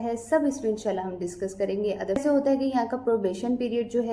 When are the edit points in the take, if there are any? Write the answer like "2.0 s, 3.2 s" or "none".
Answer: 2.2 s